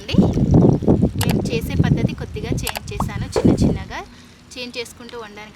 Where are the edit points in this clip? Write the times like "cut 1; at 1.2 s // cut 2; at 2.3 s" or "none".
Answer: cut 1; at 1.2 s